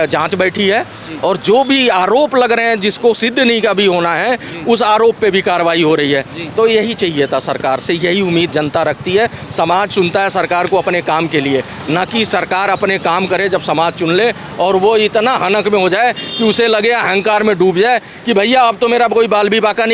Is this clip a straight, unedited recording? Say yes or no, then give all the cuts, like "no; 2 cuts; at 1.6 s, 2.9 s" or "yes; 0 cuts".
yes; 0 cuts